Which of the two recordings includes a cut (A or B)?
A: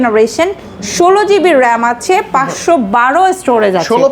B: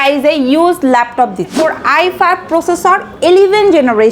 B